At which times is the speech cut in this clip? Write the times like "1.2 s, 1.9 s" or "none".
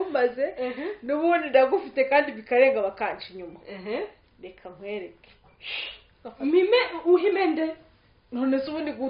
none